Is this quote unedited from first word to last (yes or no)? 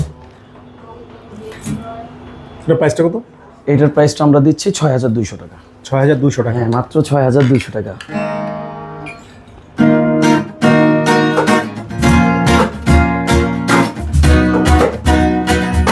yes